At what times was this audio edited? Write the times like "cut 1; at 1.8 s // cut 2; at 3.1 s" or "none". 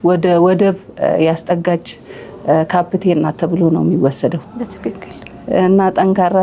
none